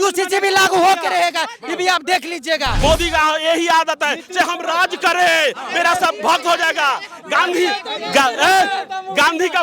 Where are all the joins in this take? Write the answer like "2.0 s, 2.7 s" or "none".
2.7 s